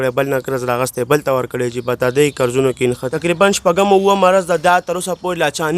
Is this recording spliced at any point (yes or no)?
yes